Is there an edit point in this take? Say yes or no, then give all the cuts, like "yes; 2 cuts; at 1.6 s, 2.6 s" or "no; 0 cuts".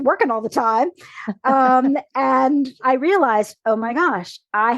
yes; 1 cut; at 2.8 s